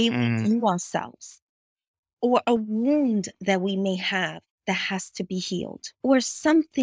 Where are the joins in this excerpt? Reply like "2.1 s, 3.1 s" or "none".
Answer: 5.8 s